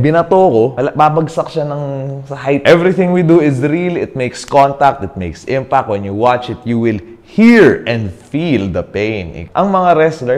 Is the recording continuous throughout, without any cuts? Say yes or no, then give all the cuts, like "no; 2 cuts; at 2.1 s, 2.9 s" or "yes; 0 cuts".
no; 3 cuts; at 0.7 s, 2.6 s, 9.4 s